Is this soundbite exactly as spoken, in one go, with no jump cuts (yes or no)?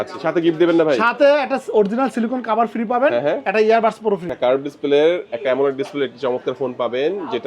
no